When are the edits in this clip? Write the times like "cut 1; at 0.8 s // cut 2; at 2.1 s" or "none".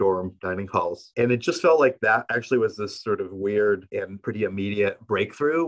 none